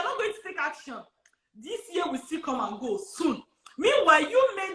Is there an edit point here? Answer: no; 0 cuts

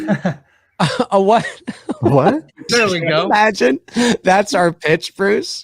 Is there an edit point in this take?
yes; 1 cut; at 2.7 s

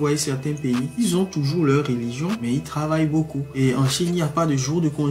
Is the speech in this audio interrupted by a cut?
no; 0 cuts

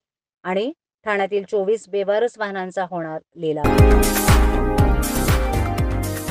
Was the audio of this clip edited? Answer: yes; 1 cut; at 3.6 s

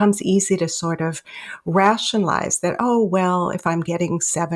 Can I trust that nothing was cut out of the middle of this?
yes; 0 cuts

